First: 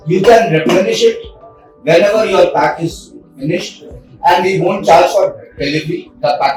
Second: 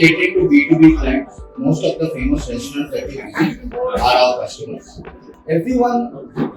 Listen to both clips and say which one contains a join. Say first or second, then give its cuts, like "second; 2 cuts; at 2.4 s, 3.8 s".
second; 1 cut; at 5.3 s